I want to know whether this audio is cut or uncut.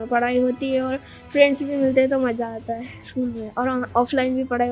uncut